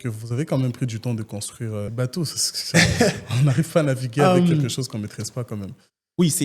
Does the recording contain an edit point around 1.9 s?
yes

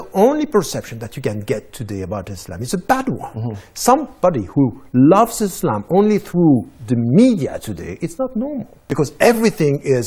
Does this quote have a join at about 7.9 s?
no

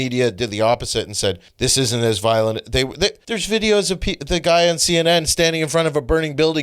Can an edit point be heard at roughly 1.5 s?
yes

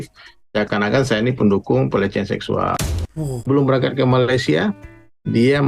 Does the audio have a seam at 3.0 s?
yes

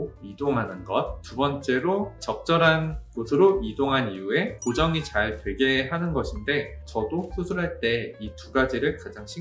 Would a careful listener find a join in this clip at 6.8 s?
yes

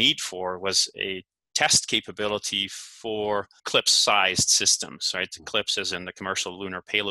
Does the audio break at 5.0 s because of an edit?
no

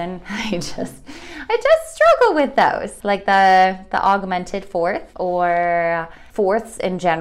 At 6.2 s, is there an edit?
yes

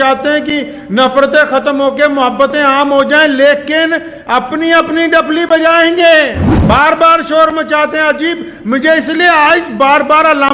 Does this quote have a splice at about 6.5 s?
yes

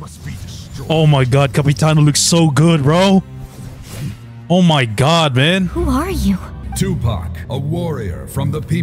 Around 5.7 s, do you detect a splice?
yes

